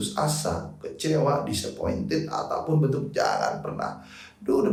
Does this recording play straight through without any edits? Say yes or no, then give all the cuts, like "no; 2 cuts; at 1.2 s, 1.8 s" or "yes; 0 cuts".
yes; 0 cuts